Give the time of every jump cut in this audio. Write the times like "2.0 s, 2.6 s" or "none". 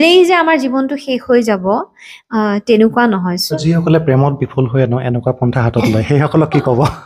3.4 s